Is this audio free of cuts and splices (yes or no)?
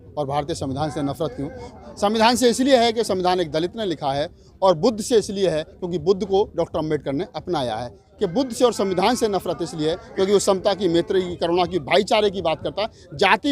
no